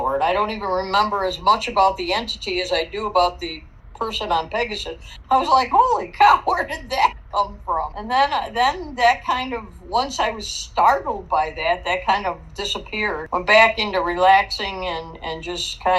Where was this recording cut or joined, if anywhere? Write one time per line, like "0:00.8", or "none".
0:07.9
0:13.2